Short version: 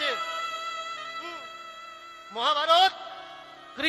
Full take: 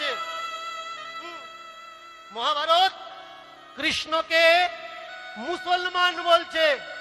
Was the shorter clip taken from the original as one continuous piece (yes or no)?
yes